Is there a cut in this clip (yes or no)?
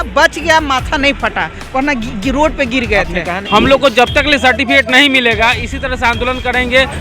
yes